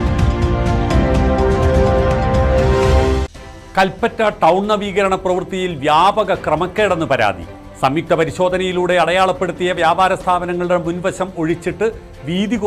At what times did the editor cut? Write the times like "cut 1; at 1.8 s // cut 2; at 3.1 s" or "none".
cut 1; at 2.8 s